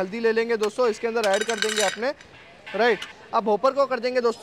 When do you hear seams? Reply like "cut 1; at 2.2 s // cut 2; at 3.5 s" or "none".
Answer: cut 1; at 3.2 s

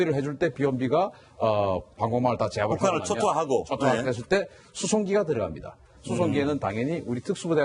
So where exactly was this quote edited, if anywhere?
cut 1; at 4.9 s

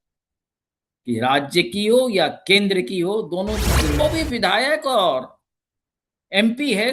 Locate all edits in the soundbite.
cut 1; at 4.0 s

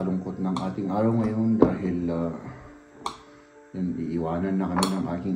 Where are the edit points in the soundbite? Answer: none

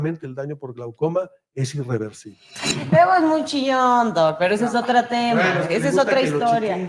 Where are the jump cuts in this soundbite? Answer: cut 1; at 2.5 s

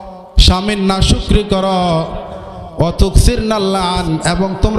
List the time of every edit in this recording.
none

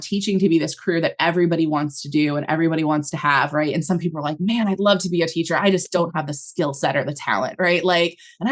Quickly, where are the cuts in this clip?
none

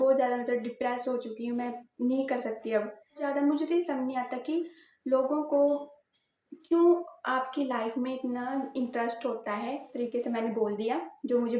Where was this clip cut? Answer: cut 1; at 3.2 s // cut 2; at 9.8 s

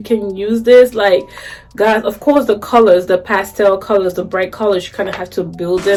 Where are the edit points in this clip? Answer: none

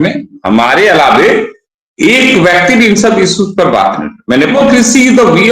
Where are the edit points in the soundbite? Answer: cut 1; at 4.5 s

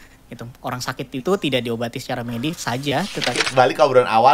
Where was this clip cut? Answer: cut 1; at 3.3 s

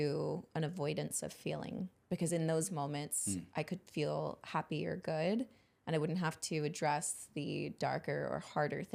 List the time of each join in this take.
none

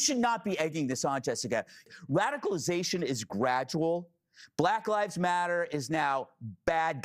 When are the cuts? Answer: cut 1; at 1.8 s

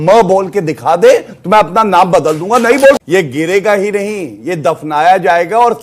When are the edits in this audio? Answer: cut 1; at 3.0 s

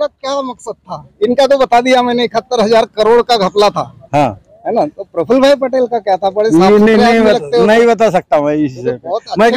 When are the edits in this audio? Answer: none

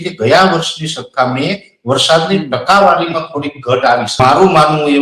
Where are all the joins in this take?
cut 1; at 4.1 s

